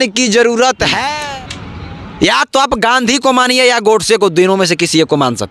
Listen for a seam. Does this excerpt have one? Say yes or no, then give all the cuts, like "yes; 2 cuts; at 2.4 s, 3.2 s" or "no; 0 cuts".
yes; 1 cut; at 1.1 s